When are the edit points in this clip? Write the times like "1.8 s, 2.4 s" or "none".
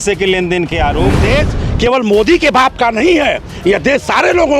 1.2 s

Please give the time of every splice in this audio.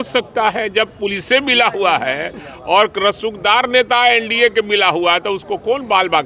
none

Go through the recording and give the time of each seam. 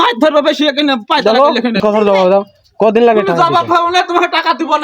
1.8 s

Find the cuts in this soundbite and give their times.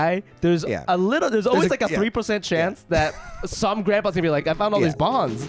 4.4 s

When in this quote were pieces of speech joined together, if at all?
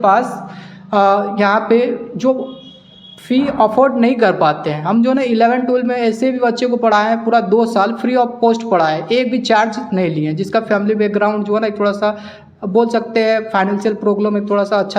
none

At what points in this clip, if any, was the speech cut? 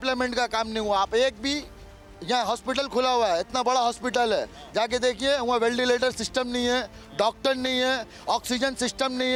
none

